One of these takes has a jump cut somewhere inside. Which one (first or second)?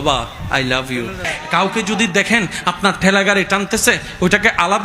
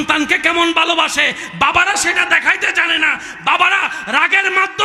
first